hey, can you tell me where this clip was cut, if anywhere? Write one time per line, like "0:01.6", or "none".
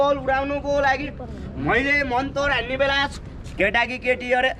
0:03.1